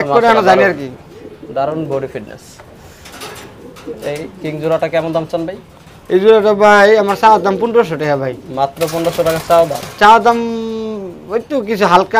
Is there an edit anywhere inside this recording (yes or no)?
no